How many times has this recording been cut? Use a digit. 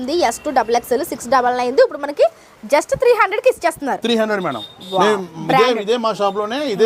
0